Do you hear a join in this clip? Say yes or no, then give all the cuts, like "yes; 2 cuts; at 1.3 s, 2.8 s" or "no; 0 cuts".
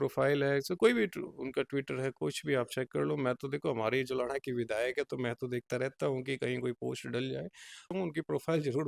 yes; 1 cut; at 7.9 s